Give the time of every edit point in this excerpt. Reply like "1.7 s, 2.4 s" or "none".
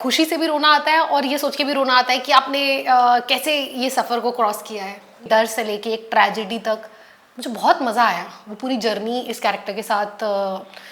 5.2 s